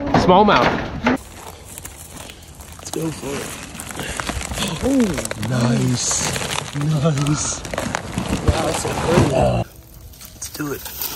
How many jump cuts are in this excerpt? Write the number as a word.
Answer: two